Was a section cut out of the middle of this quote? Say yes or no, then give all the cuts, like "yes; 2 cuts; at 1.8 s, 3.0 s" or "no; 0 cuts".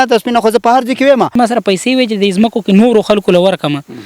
yes; 1 cut; at 1.3 s